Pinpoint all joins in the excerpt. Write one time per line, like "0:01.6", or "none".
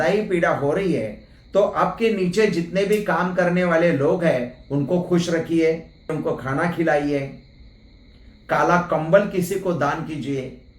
0:06.2